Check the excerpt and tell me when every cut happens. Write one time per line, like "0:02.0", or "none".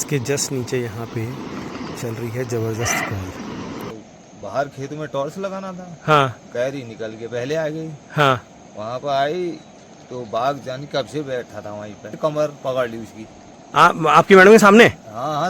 0:03.9
0:12.1